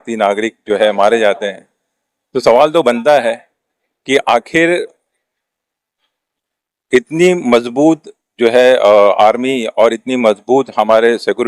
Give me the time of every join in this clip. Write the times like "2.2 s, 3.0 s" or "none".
none